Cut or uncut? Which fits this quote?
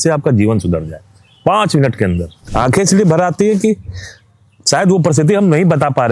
cut